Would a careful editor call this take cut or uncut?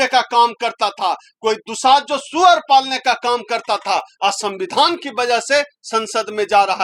uncut